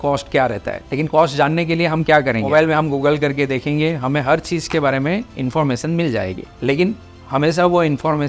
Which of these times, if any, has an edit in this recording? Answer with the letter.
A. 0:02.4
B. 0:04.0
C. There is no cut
A